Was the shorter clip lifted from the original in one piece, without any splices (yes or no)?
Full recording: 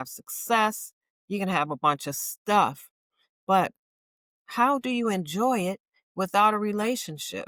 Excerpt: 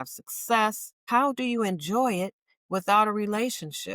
no